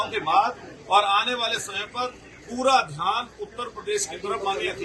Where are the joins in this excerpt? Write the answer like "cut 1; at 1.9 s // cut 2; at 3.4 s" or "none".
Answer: none

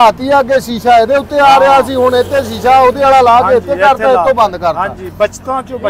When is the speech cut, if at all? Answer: none

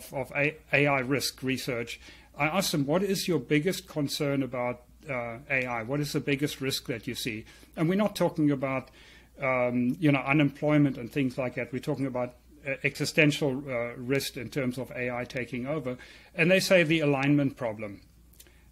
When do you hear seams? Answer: none

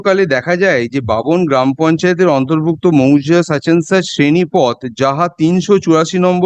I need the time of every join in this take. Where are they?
none

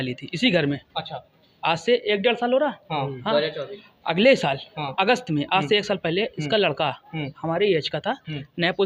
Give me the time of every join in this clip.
none

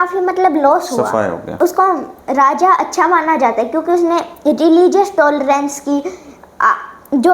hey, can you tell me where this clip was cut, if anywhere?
cut 1; at 1.5 s

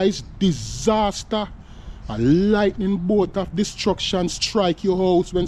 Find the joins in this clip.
none

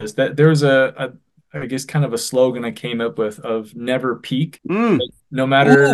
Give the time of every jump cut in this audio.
cut 1; at 4.6 s

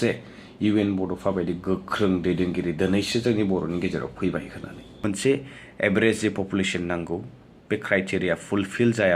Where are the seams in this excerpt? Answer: cut 1; at 5.0 s

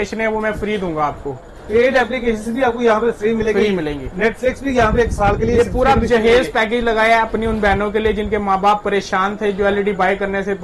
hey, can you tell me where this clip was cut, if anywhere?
none

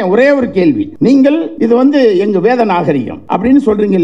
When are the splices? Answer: cut 1; at 0.9 s // cut 2; at 1.5 s // cut 3; at 3.1 s

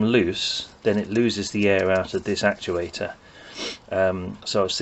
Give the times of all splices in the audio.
none

